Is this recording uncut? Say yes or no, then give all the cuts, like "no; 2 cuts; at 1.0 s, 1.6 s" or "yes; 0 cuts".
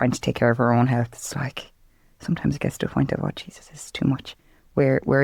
yes; 0 cuts